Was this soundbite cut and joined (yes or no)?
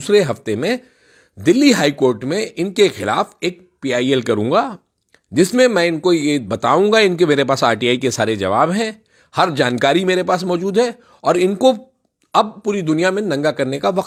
no